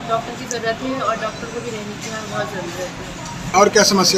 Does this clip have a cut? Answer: no; 0 cuts

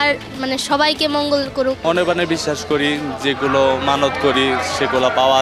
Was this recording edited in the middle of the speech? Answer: yes; 1 cut; at 1.8 s

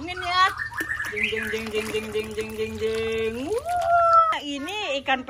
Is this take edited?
yes; 1 cut; at 4.3 s

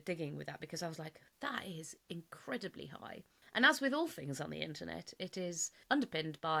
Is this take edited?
no; 0 cuts

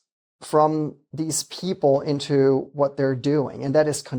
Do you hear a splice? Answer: no; 0 cuts

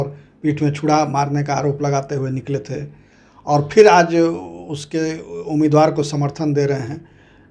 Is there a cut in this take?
no; 0 cuts

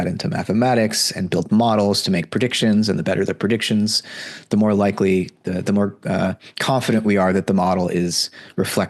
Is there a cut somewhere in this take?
no; 0 cuts

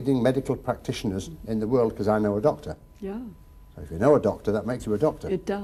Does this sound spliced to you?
no; 0 cuts

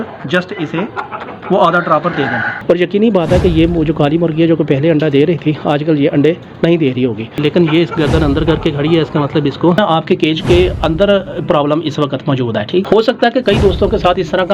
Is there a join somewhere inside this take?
yes; 4 cuts; at 2.6 s, 7.3 s, 9.8 s, 12.9 s

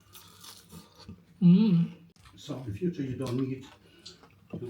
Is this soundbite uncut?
no; 1 cut; at 2.4 s

